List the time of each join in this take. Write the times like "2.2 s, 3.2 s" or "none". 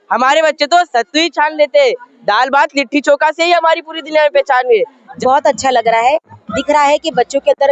5.0 s